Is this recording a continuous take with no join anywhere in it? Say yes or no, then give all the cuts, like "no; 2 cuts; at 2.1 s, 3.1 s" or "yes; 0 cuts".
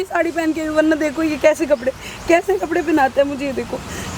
yes; 0 cuts